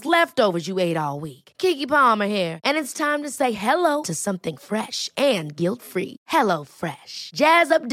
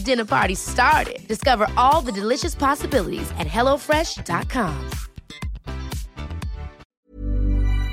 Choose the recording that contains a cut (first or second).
second